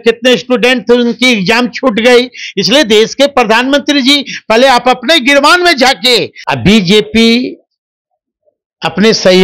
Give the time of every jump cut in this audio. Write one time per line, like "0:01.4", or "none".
0:06.4